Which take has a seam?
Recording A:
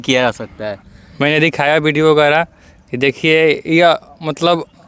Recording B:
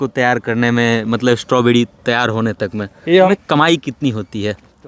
B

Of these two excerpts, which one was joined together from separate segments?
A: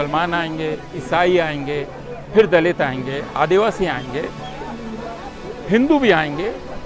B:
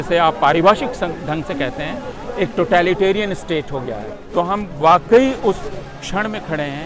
B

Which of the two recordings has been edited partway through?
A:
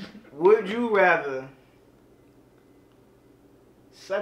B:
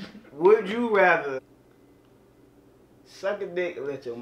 B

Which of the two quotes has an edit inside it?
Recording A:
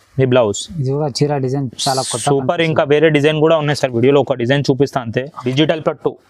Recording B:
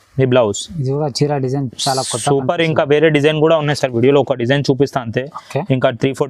A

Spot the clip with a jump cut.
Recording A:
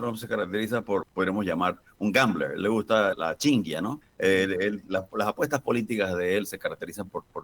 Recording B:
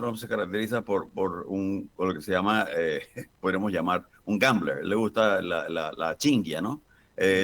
A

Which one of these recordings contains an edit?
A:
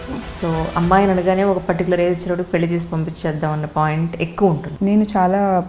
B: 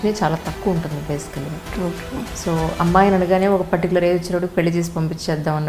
A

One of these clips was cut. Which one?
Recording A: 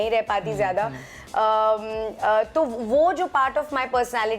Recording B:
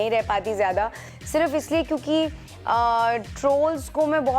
B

